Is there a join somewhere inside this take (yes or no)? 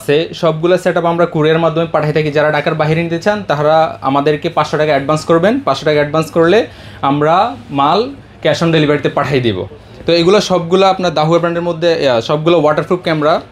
no